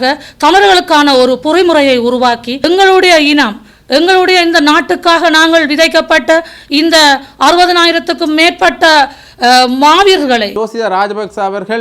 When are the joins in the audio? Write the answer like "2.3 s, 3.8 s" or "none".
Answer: 2.6 s, 10.5 s